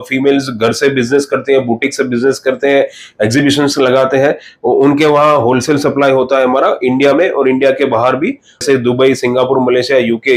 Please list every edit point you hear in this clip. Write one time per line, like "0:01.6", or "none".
0:08.6